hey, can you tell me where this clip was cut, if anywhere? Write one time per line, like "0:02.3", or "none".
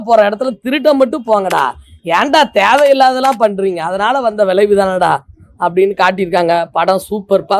none